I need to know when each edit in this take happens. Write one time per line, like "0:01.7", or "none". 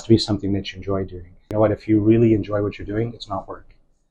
0:01.4